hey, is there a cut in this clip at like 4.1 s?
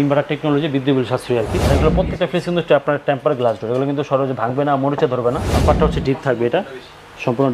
no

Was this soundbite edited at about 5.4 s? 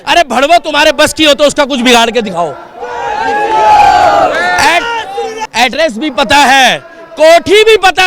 yes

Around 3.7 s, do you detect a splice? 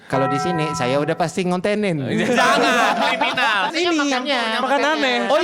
yes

